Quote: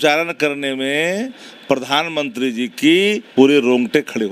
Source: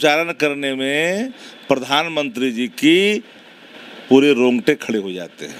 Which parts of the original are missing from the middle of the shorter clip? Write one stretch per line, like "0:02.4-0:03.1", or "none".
0:03.2-0:04.0